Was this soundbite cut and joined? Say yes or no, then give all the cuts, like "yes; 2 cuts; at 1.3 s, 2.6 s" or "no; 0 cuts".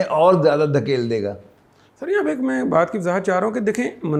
no; 0 cuts